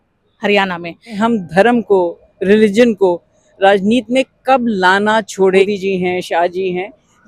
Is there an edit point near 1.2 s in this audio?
yes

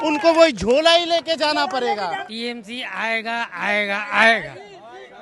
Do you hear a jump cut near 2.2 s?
yes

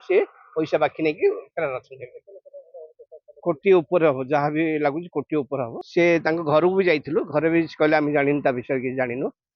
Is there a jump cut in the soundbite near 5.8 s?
yes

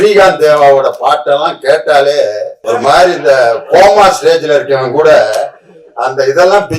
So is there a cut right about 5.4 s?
no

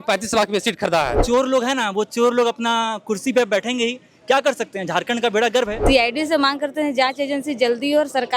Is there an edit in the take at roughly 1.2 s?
yes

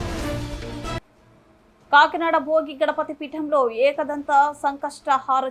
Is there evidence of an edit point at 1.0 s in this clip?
yes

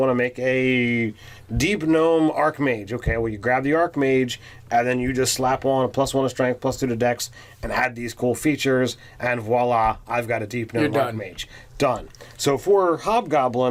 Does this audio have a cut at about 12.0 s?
no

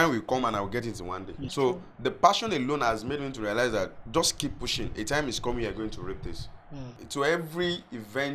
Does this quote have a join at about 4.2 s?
no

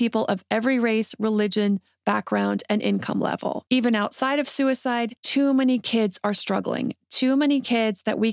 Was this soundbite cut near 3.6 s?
yes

